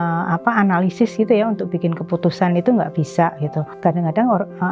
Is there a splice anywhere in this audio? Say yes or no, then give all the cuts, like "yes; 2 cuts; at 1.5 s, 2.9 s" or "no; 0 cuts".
yes; 1 cut; at 3.6 s